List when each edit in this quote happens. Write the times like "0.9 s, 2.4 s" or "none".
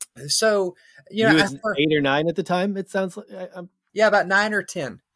3.8 s